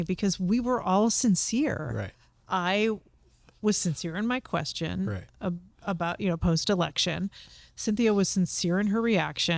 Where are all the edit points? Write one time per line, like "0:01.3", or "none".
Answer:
none